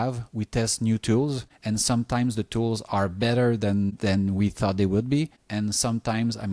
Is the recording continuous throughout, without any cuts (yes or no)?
no